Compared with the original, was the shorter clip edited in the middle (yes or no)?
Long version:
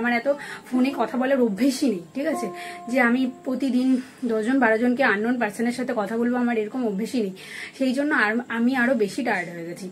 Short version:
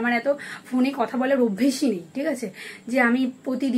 no